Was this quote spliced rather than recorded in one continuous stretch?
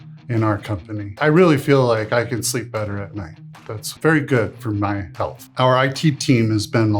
yes; 3 cuts; at 1.2 s, 3.9 s, 5.4 s

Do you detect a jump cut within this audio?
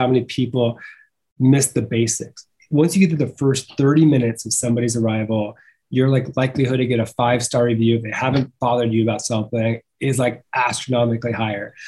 no; 0 cuts

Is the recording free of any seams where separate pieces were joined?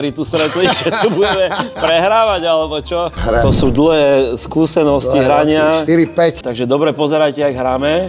no; 2 cuts; at 3.2 s, 6.4 s

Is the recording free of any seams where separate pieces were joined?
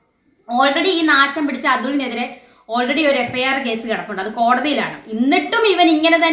yes; 0 cuts

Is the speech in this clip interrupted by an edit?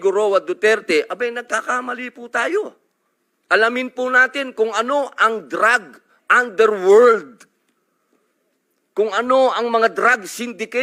no; 0 cuts

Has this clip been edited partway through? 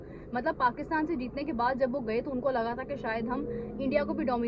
no; 0 cuts

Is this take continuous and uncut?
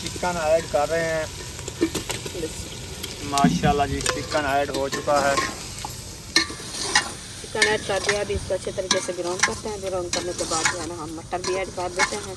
yes; 0 cuts

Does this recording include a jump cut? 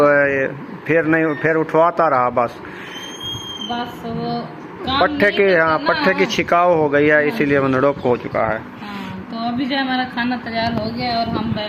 no; 0 cuts

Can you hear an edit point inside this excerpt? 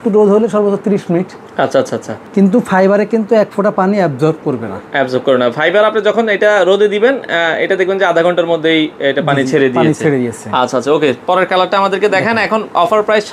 no; 0 cuts

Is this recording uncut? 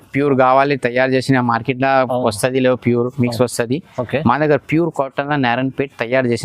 yes; 0 cuts

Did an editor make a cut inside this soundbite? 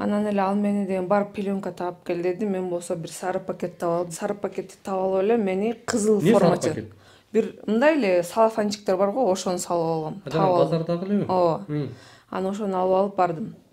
no; 0 cuts

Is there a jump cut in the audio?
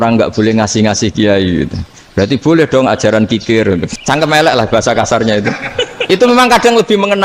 yes; 1 cut; at 3.9 s

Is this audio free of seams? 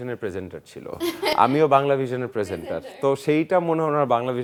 yes; 0 cuts

